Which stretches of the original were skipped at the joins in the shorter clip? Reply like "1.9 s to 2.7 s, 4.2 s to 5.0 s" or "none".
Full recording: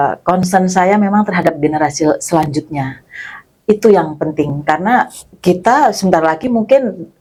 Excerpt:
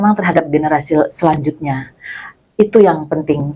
none